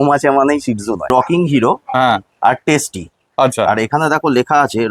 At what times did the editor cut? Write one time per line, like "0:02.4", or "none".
0:01.1